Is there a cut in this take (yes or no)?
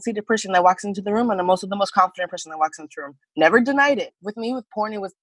yes